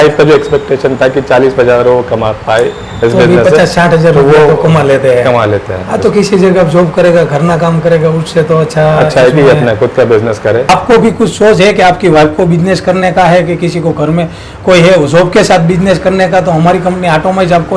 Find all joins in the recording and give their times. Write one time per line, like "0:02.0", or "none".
0:10.7